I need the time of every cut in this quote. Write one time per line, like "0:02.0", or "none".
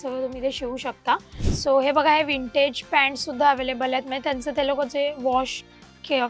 0:01.4

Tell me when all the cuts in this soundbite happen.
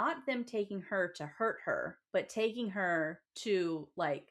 0:02.0
0:03.3

